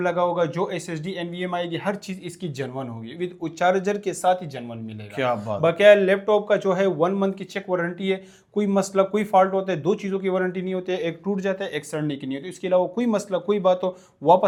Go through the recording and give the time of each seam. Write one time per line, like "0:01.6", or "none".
none